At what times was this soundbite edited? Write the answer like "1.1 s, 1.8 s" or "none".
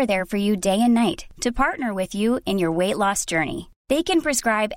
none